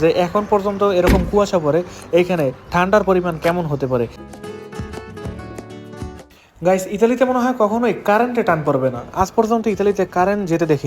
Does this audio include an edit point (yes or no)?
yes